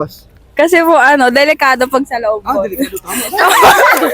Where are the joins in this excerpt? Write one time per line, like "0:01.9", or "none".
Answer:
0:02.5

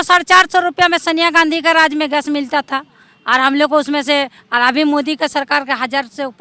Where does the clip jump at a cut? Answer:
none

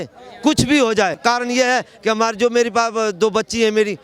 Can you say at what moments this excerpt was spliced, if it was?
0:01.2

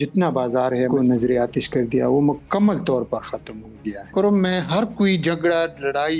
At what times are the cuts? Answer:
0:00.9
0:04.0

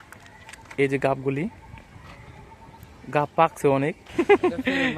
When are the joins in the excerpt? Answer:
0:04.0

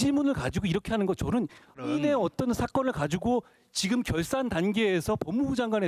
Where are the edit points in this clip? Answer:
0:01.8

